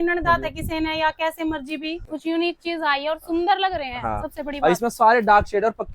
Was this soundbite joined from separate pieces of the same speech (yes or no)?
yes